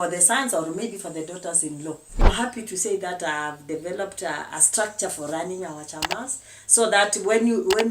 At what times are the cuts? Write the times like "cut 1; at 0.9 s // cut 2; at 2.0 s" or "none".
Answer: cut 1; at 2.2 s